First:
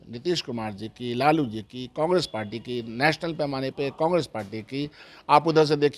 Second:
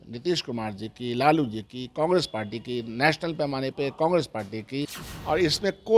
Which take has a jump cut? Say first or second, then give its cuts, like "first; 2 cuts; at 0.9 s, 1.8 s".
second; 1 cut; at 5.1 s